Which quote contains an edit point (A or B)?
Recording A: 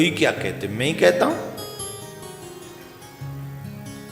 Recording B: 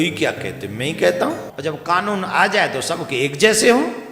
B